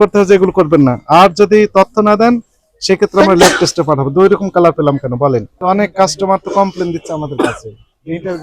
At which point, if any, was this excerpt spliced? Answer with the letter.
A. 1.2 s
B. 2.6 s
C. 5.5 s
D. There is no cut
C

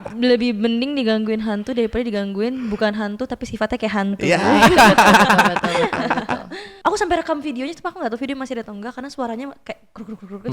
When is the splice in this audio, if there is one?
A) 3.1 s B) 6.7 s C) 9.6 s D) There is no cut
B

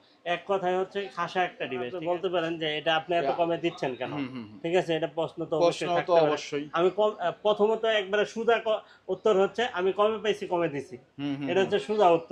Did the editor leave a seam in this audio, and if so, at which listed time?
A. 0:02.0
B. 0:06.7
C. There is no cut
A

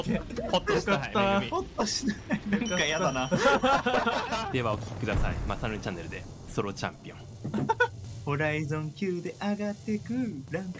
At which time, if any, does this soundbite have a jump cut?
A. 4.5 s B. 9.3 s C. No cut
A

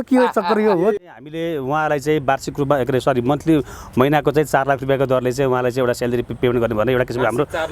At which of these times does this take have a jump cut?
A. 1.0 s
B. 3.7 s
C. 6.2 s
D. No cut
A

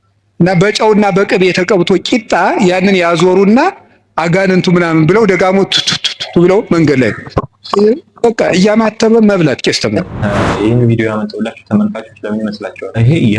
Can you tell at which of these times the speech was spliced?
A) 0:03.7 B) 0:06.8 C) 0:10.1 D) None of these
C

